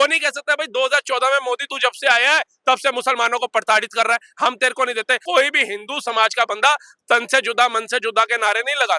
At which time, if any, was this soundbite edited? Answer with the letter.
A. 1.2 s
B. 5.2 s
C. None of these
B